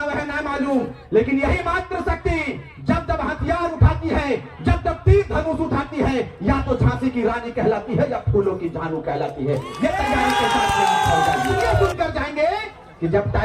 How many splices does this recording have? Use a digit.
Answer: 1